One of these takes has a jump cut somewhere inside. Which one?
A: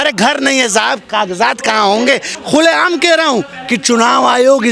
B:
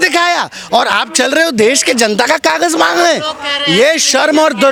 A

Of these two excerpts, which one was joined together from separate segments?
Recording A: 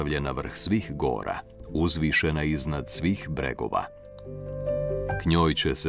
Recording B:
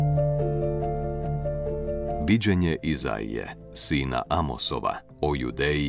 B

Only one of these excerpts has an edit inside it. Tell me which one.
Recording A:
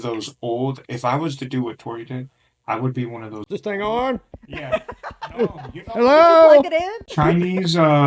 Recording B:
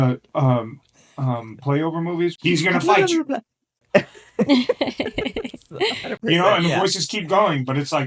B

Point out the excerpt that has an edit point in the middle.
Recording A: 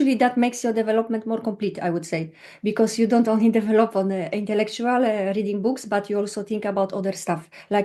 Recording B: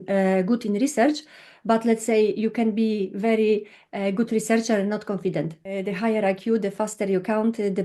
B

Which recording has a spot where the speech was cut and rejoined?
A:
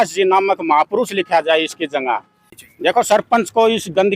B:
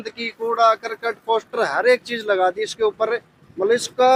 A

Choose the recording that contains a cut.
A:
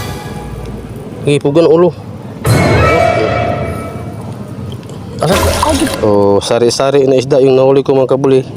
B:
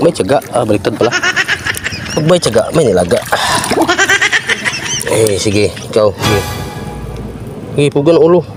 A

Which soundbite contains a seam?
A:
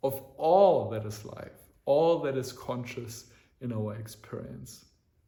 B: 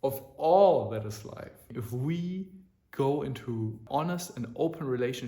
B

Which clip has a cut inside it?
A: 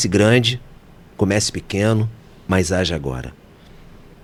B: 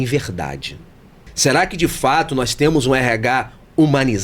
B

